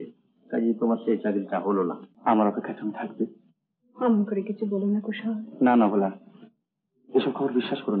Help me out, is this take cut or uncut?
cut